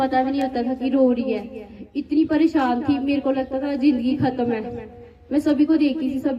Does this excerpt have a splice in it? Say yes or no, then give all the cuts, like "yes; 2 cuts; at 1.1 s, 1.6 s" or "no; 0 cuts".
no; 0 cuts